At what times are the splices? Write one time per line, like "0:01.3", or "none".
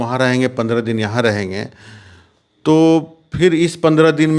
none